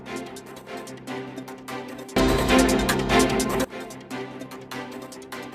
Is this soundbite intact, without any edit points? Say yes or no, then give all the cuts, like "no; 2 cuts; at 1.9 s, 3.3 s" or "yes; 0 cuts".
yes; 0 cuts